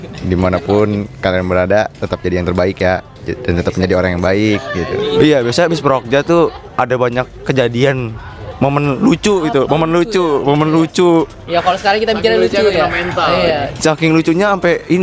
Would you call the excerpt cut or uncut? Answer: cut